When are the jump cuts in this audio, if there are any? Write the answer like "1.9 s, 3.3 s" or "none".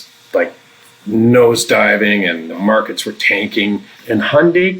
2.5 s, 3.9 s